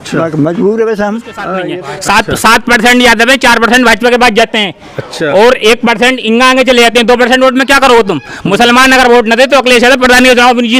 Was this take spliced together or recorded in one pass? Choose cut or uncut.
cut